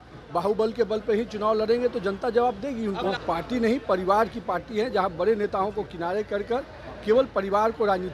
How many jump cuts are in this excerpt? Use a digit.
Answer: 1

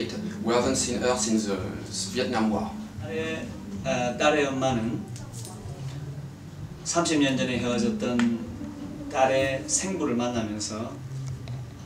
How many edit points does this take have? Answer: 1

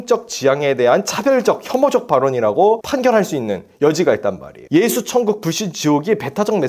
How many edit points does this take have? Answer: 1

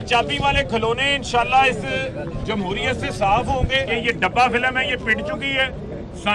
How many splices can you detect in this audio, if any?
1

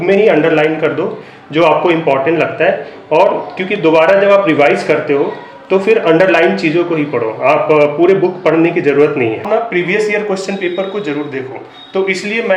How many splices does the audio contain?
1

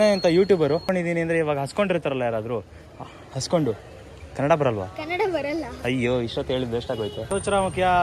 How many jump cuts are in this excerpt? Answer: 2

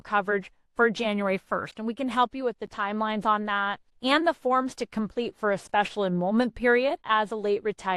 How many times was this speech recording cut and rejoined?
2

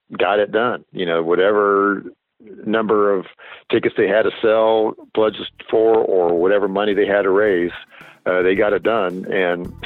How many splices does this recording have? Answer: 0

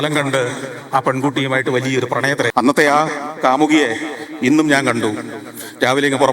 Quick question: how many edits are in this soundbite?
1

